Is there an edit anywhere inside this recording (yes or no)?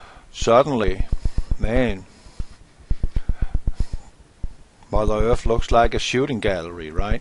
yes